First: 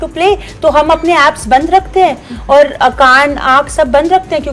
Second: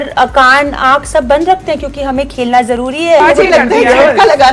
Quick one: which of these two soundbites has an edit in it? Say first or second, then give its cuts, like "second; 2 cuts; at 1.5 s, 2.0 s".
second; 1 cut; at 3.2 s